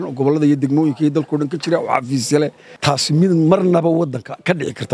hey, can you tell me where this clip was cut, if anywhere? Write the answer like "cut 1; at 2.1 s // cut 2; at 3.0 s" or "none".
cut 1; at 2.6 s